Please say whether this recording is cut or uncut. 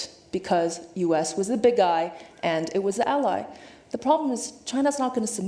uncut